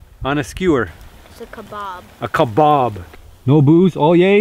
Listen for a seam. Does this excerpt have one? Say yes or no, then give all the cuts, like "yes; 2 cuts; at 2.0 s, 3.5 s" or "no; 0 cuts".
yes; 1 cut; at 3.0 s